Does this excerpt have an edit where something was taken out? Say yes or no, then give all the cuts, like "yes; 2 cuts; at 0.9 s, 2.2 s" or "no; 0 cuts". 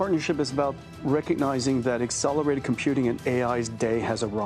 no; 0 cuts